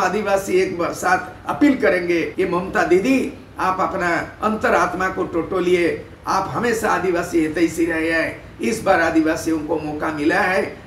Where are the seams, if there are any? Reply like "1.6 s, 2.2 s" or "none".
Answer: 2.3 s